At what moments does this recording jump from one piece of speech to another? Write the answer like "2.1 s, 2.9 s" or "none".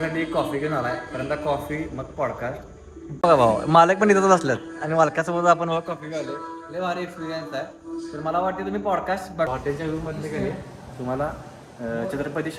3.2 s, 9.5 s